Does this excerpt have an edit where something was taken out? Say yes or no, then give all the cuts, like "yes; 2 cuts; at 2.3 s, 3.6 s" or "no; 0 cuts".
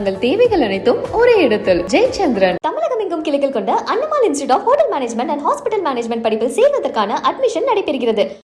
no; 0 cuts